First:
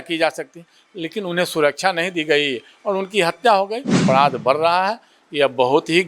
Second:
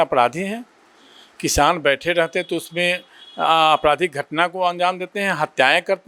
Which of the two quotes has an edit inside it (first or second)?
first